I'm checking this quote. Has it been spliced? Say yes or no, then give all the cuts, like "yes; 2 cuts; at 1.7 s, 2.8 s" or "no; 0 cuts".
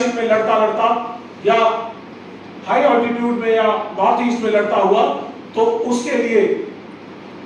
no; 0 cuts